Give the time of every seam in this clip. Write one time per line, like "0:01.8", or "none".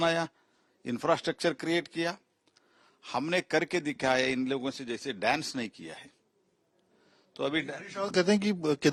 none